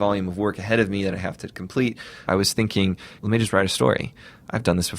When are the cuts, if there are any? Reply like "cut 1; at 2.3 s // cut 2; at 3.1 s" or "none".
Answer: cut 1; at 2.2 s // cut 2; at 3.2 s